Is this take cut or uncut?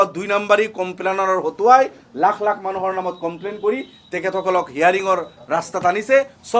uncut